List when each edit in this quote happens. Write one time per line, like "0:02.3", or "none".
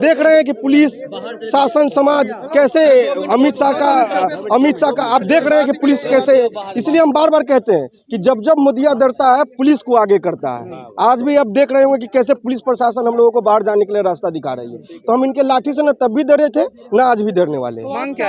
none